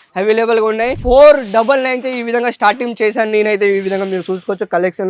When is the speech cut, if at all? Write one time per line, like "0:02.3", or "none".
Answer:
0:01.0